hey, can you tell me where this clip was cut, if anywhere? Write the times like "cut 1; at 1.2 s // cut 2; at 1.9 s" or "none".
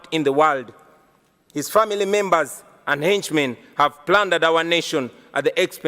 none